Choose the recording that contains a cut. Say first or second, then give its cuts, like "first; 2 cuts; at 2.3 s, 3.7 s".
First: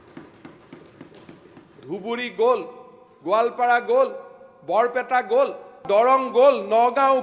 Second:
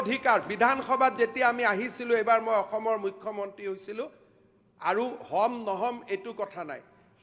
first; 1 cut; at 5.8 s